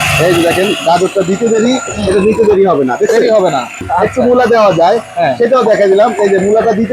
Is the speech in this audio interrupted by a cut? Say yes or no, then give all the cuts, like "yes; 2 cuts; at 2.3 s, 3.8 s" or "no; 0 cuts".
yes; 1 cut; at 3.8 s